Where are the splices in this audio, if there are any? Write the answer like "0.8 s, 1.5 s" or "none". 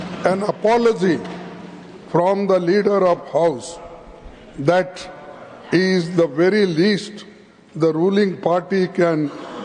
none